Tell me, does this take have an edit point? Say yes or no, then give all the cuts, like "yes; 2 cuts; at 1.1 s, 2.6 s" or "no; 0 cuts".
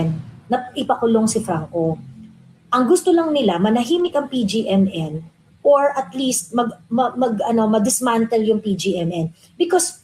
no; 0 cuts